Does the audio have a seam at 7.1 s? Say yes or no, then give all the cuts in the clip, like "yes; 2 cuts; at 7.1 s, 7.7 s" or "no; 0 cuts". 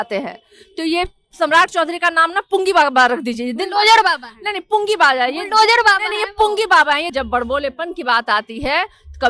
yes; 1 cut; at 7.1 s